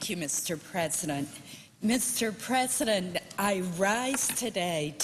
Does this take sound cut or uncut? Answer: uncut